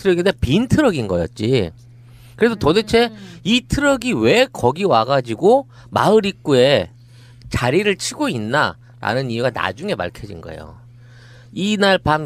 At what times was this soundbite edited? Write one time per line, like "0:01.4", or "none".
none